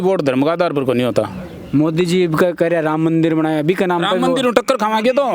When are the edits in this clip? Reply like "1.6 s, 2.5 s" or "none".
none